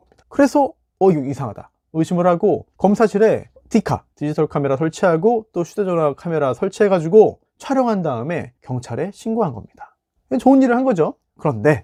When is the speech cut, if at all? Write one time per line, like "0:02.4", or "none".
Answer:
none